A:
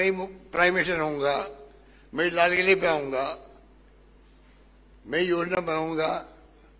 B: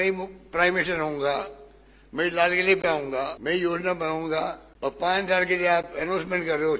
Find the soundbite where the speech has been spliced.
B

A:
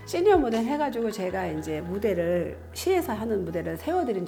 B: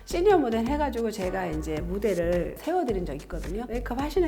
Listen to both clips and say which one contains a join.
B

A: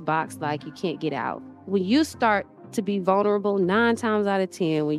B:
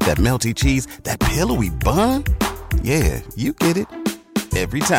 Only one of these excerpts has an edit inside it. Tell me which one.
A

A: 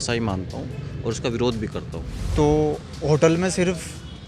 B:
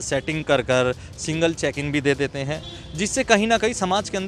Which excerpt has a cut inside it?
A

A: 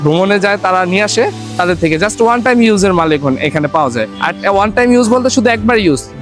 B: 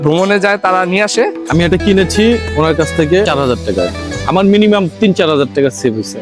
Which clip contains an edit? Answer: B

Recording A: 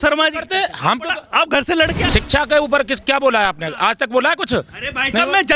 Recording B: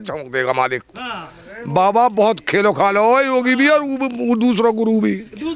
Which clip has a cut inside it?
A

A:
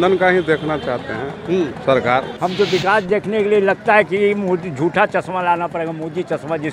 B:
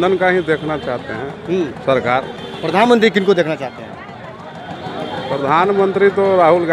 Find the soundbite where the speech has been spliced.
A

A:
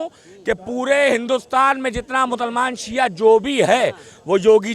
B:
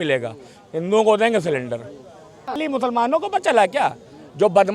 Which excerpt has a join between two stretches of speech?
B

